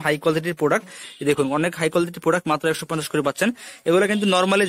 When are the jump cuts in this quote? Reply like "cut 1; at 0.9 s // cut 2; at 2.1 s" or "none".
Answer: none